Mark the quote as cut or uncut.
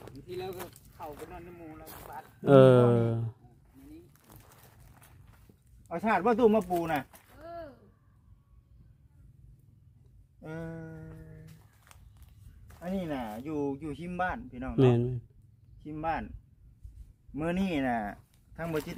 uncut